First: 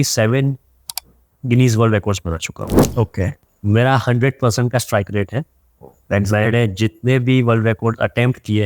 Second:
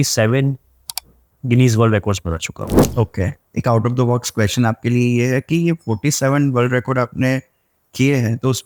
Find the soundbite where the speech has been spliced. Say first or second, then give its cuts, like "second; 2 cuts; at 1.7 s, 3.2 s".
first; 1 cut; at 3.4 s